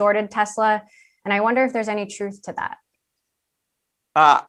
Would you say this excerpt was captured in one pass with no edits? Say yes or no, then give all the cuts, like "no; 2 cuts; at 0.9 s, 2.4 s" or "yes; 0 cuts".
yes; 0 cuts